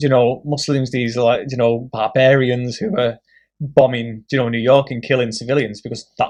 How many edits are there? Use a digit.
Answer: 0